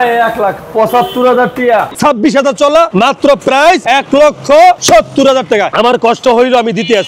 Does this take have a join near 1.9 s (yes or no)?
yes